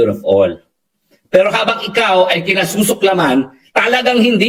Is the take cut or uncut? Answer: uncut